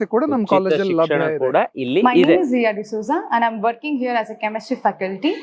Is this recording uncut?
yes; 0 cuts

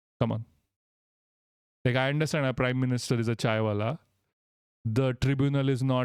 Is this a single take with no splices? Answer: yes; 0 cuts

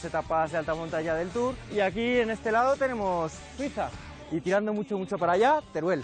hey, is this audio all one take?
yes; 0 cuts

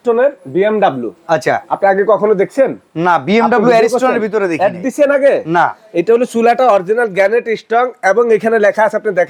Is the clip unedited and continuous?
yes; 0 cuts

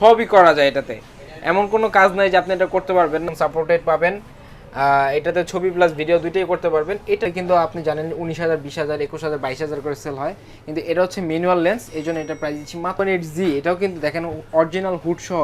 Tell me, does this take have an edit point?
yes; 3 cuts; at 3.3 s, 7.3 s, 12.9 s

